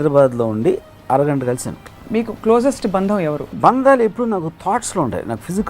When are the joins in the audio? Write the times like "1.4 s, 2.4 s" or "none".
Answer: 1.9 s, 3.5 s